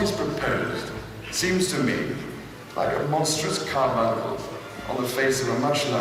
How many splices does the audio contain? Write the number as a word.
zero